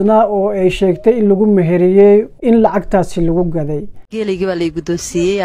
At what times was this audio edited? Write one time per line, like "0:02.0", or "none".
0:03.9